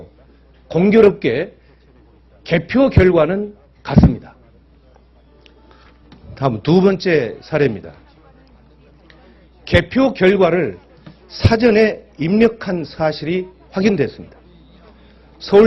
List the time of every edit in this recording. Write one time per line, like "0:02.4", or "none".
0:06.7